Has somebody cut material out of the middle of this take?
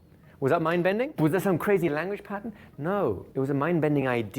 yes; 2 cuts; at 1.1 s, 3.2 s

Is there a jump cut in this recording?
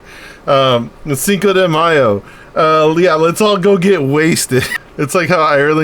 yes; 1 cut; at 4.8 s

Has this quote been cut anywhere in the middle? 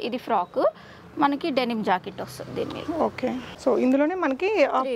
no; 0 cuts

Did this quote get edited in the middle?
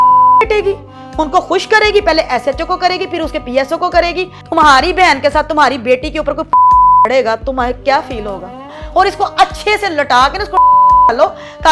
yes; 2 cuts; at 4.3 s, 8.8 s

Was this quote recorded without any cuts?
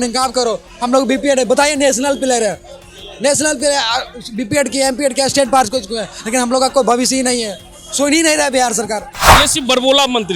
no; 1 cut; at 9.0 s

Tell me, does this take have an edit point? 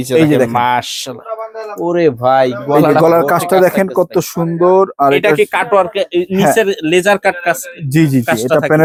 no; 0 cuts

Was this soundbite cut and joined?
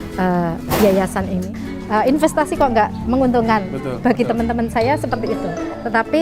yes; 1 cut; at 1.5 s

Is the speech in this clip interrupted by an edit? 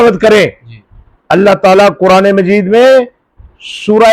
no; 0 cuts

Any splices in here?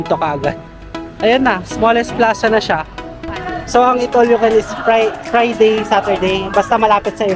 yes; 1 cut; at 3.2 s

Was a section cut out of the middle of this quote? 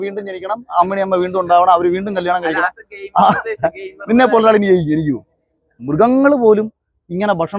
yes; 1 cut; at 5.8 s

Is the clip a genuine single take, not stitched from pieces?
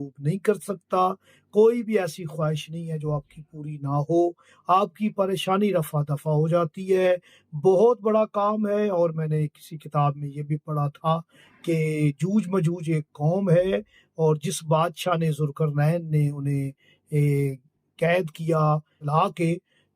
no; 1 cut; at 19.0 s

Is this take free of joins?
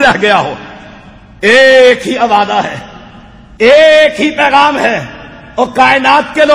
yes; 0 cuts

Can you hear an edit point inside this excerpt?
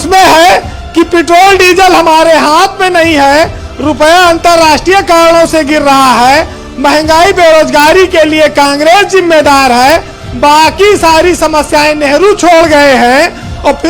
no; 0 cuts

